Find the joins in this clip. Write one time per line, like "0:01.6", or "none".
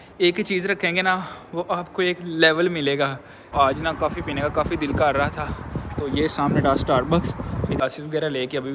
0:03.5
0:07.8